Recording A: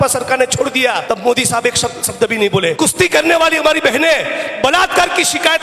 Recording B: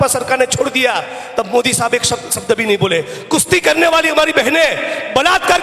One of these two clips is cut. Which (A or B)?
A